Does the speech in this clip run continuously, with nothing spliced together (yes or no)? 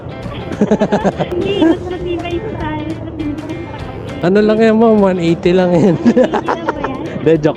no